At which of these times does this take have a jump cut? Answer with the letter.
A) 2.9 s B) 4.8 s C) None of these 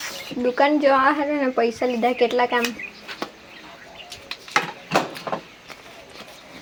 C